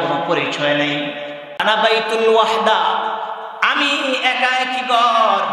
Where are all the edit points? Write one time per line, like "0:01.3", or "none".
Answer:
0:01.6